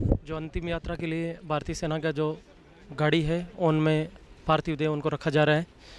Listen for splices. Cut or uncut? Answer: uncut